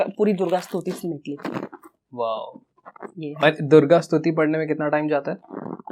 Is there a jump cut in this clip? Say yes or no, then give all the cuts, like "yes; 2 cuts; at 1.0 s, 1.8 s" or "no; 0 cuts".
no; 0 cuts